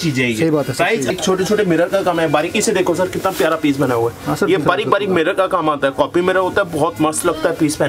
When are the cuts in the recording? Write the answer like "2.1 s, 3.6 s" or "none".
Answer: 1.1 s